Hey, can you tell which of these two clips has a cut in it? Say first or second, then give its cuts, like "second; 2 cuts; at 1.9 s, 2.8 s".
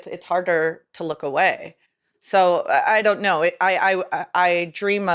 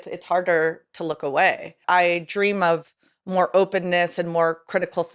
second; 1 cut; at 1.8 s